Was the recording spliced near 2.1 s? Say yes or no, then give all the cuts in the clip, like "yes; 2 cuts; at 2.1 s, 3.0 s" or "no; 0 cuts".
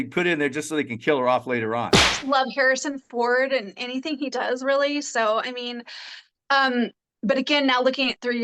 yes; 1 cut; at 2.1 s